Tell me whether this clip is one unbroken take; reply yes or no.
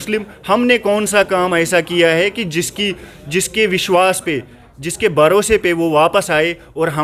yes